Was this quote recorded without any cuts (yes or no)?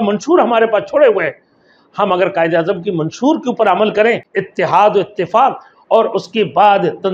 no